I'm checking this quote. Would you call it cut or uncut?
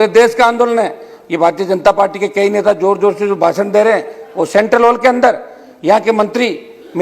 uncut